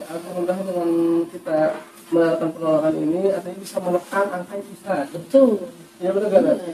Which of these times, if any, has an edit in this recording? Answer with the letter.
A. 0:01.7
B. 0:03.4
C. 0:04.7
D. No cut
D